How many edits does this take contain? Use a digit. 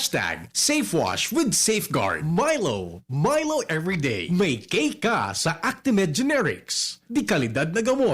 1